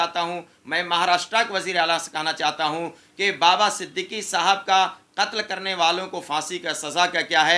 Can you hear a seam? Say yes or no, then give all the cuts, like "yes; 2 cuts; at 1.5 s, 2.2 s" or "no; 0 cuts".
no; 0 cuts